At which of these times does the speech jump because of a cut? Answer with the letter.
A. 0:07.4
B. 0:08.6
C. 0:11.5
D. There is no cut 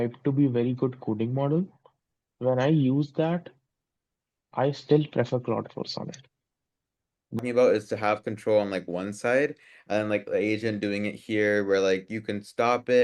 A